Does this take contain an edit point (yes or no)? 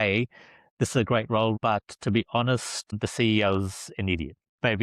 yes